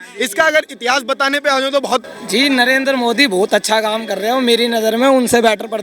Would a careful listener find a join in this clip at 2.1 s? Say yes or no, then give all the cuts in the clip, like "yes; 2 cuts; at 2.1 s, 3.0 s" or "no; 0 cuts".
yes; 1 cut; at 2.1 s